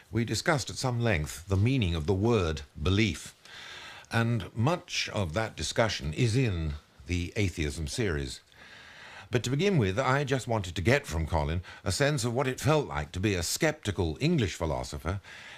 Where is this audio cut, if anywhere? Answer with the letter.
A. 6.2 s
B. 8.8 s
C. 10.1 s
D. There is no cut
D